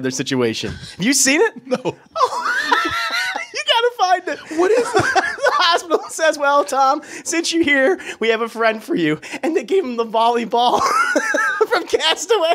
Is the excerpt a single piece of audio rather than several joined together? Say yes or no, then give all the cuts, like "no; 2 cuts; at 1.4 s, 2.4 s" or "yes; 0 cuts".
yes; 0 cuts